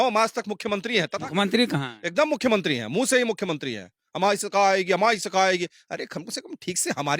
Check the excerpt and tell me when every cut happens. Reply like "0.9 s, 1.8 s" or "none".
none